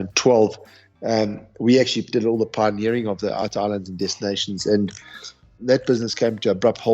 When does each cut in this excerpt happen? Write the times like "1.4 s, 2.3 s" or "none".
3.4 s, 5.5 s